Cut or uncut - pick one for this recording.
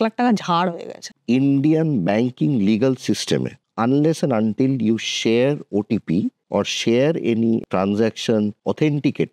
cut